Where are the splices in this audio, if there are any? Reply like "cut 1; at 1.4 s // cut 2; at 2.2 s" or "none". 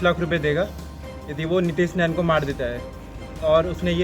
none